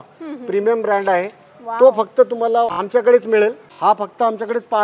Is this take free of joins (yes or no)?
no